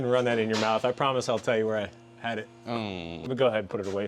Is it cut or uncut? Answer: cut